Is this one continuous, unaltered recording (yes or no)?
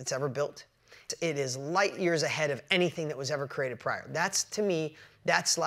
no